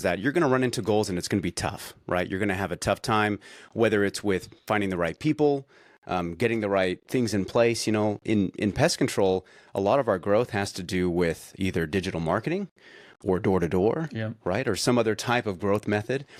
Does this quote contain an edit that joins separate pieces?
no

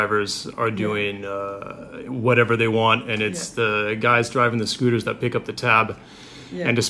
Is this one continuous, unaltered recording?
no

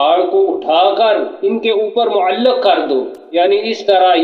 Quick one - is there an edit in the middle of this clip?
yes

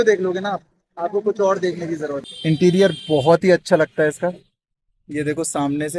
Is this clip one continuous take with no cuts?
no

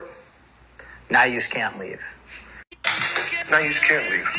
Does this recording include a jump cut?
no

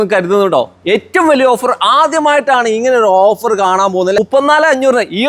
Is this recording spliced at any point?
yes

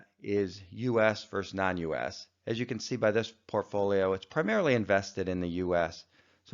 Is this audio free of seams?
no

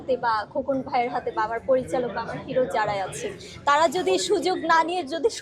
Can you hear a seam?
no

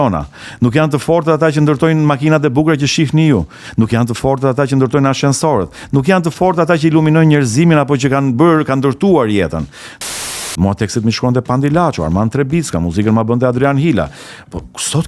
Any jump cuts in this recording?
yes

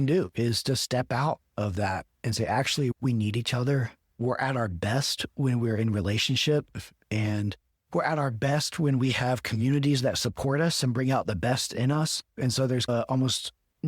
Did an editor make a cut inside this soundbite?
yes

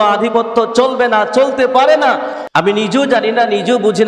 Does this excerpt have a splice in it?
yes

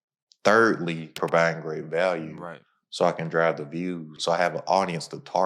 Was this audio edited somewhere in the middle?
yes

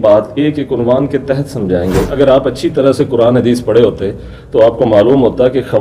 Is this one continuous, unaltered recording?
no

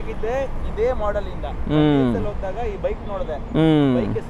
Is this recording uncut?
yes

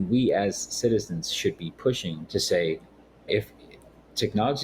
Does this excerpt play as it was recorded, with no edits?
no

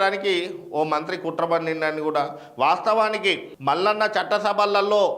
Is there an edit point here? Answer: no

